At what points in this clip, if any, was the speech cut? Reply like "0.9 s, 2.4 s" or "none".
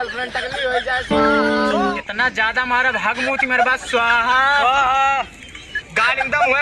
2.0 s